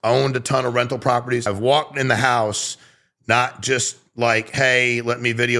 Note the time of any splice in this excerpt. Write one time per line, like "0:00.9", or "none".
0:01.5